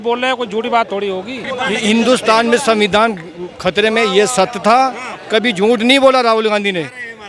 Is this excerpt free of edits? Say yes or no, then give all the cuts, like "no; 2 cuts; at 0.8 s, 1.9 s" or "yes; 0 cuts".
no; 1 cut; at 1.4 s